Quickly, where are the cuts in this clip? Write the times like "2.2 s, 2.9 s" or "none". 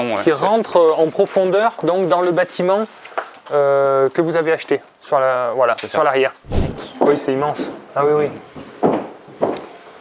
6.7 s